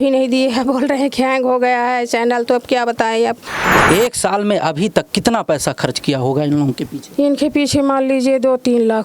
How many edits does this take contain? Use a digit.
1